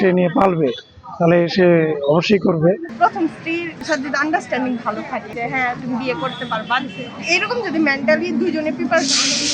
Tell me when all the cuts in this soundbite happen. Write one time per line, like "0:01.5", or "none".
0:02.9
0:03.8
0:05.3